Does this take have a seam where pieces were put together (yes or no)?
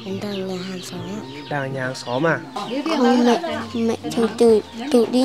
yes